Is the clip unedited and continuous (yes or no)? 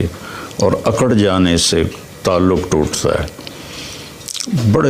yes